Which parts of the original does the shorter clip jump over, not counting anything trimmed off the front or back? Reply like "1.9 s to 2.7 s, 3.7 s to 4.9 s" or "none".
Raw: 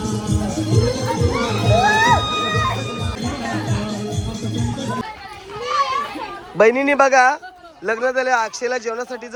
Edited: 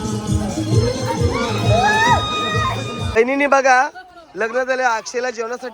3.2 s to 6.6 s